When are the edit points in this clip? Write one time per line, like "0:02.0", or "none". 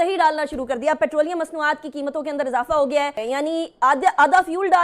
0:03.2